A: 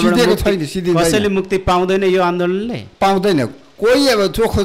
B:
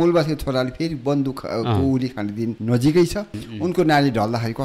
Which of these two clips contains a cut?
B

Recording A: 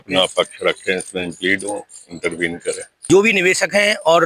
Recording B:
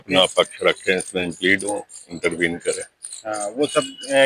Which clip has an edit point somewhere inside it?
A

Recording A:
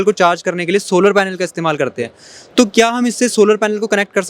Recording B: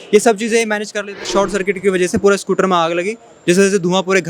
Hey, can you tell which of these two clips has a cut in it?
B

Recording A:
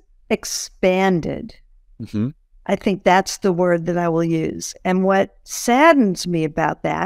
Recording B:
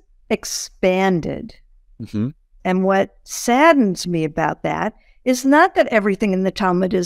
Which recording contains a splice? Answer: B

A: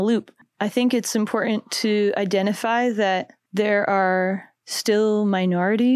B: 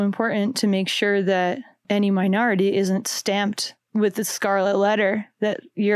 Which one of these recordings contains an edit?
B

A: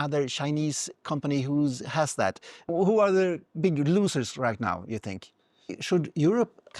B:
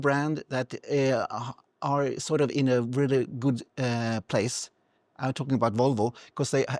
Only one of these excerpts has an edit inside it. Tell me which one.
A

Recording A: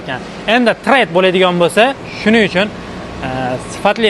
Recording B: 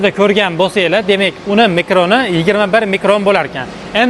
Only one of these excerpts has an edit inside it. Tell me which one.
A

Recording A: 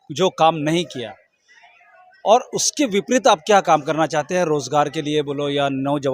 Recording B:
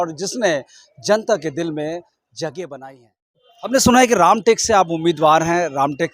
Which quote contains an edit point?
B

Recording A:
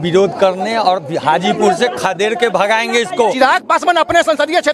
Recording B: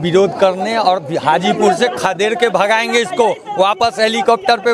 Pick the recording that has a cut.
A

